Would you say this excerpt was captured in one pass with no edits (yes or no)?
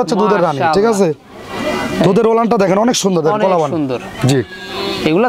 yes